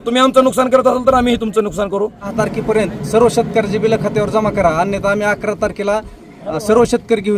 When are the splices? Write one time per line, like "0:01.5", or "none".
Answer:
0:02.3